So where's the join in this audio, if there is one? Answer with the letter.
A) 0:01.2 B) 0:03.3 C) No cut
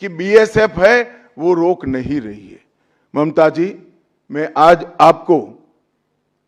C